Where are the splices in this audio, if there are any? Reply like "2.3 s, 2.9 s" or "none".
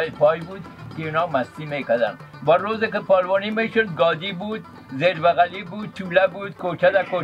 none